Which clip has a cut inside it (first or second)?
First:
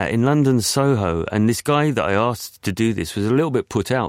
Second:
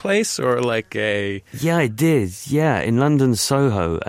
second